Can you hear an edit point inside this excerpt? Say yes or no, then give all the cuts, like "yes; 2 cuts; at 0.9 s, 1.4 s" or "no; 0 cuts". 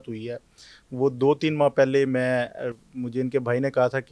no; 0 cuts